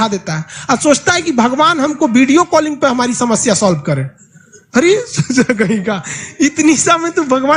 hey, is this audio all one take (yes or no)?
yes